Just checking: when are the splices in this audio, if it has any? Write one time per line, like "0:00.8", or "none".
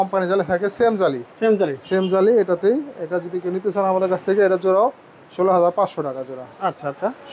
none